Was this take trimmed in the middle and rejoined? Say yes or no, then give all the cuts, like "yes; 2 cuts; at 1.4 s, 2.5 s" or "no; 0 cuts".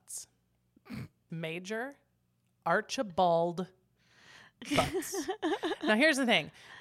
yes; 1 cut; at 1.3 s